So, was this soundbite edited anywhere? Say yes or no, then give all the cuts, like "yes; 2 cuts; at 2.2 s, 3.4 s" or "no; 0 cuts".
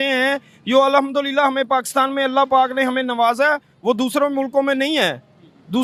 no; 0 cuts